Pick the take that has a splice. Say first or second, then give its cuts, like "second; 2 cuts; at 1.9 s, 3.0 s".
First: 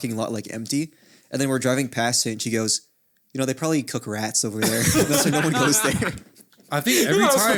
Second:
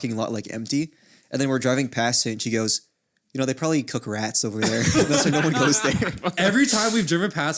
second; 1 cut; at 6.2 s